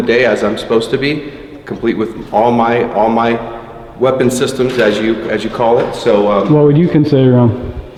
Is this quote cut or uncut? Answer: uncut